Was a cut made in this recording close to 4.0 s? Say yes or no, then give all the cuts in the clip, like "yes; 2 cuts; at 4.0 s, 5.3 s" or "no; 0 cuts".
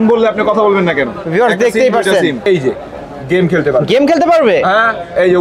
no; 1 cut; at 2.5 s